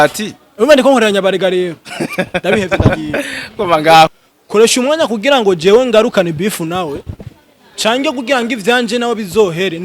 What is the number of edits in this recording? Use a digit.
1